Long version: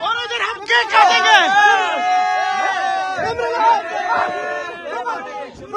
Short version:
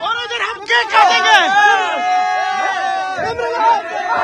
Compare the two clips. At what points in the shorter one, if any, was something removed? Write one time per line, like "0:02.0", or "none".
none